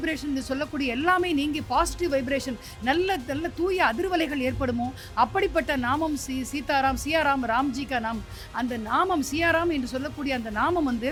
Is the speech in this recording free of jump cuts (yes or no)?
yes